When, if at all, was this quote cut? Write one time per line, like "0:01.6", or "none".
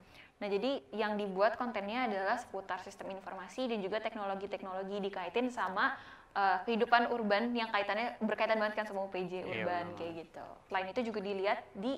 0:10.6